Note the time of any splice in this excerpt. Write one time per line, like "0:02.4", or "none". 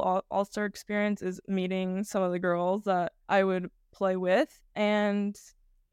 0:03.2